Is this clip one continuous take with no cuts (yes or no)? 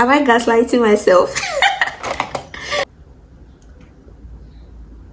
no